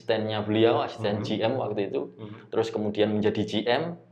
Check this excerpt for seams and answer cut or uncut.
uncut